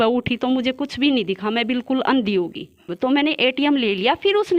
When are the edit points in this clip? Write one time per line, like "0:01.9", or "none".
0:02.9